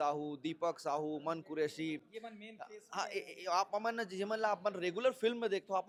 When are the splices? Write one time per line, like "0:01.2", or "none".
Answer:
none